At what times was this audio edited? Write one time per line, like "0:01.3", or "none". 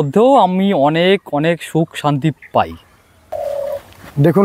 0:03.3